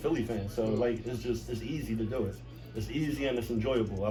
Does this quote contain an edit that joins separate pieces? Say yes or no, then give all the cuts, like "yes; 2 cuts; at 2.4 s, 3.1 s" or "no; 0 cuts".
no; 0 cuts